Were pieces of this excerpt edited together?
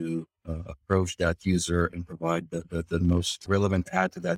yes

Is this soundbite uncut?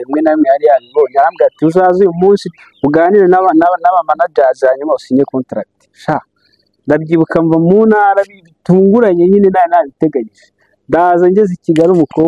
yes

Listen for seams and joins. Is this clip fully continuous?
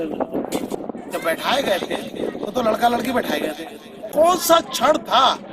no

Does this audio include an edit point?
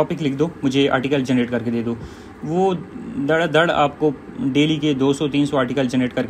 no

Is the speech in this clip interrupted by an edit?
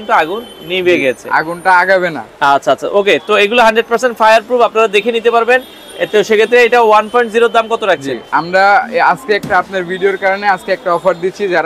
no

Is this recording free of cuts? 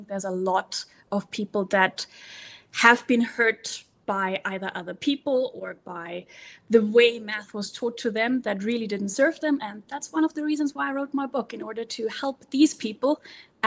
yes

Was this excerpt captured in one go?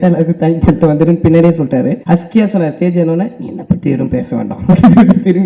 no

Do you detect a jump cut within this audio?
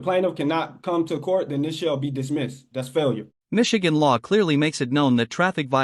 no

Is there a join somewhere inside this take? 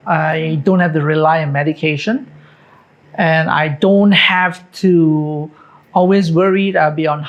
no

